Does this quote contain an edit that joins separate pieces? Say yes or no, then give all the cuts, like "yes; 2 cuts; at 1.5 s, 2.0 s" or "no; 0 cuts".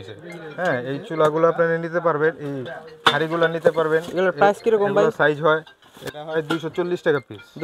no; 0 cuts